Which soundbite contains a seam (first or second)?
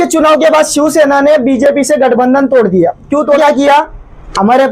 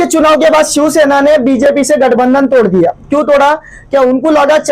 first